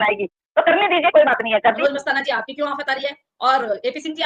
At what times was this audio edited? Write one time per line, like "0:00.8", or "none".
0:01.8